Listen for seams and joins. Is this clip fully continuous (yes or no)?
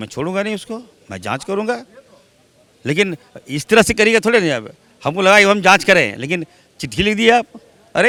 yes